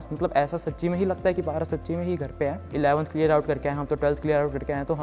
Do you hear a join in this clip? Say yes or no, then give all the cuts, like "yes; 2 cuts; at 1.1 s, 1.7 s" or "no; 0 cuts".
yes; 1 cut; at 2.6 s